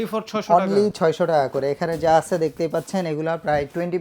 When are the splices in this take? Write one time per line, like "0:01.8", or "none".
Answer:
none